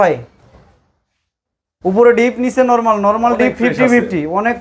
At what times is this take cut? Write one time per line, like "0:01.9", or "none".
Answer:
none

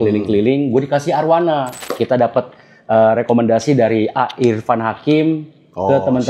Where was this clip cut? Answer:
0:01.8

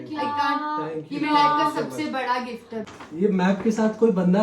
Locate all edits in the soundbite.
0:02.7

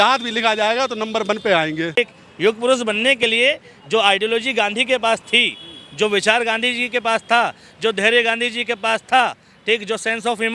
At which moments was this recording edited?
0:02.0

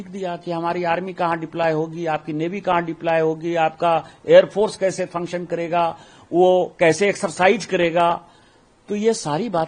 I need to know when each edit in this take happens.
none

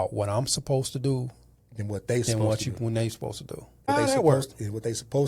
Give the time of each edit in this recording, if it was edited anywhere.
0:03.9

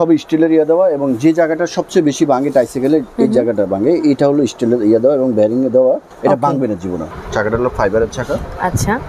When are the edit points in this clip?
0:06.1
0:07.1

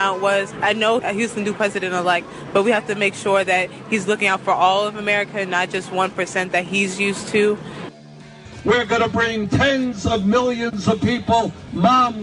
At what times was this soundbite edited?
0:01.0
0:08.1

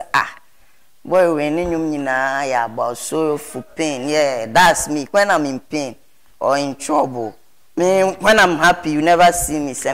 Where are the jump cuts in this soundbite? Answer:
none

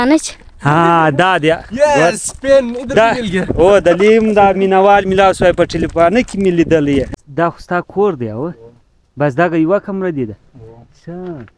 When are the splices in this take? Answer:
0:07.2

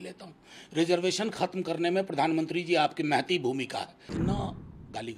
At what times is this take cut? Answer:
0:04.0

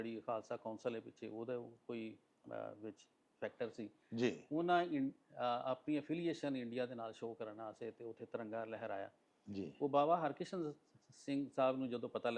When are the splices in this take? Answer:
none

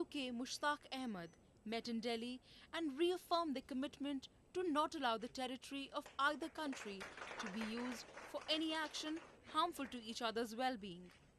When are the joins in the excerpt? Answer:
0:05.8

